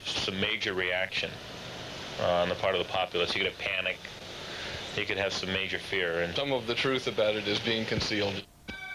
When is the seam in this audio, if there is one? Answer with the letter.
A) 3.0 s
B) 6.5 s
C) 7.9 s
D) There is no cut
A